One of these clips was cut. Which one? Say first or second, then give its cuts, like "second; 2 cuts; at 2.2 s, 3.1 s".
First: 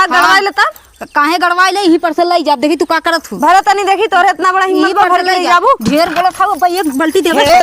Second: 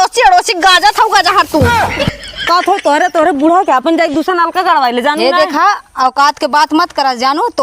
second; 1 cut; at 2.5 s